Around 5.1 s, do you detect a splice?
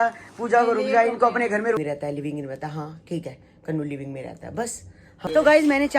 yes; 2 cuts; at 1.8 s, 5.1 s

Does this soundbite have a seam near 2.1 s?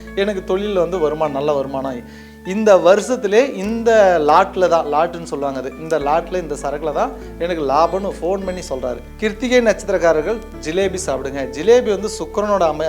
no; 1 cut; at 9.1 s

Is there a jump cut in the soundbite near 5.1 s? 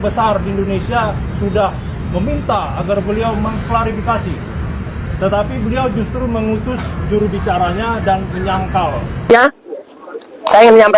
no; 1 cut; at 9.3 s

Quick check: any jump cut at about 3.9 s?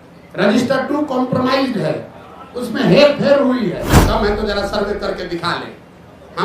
yes; 1 cut; at 3.9 s

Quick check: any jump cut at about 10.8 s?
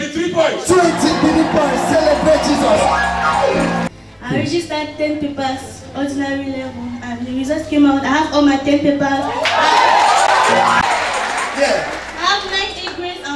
yes; 2 cuts; at 3.9 s, 10.8 s

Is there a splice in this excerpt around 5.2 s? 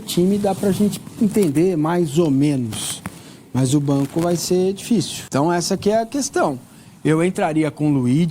yes; 1 cut; at 5.2 s

